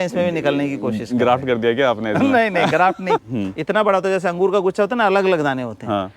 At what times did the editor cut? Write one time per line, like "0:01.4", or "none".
0:03.2